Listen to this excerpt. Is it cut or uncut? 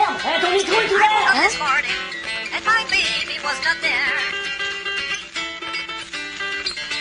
uncut